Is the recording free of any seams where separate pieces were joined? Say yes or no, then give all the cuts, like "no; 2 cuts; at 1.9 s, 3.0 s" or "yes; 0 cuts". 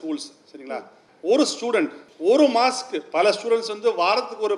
no; 2 cuts; at 1.0 s, 2.1 s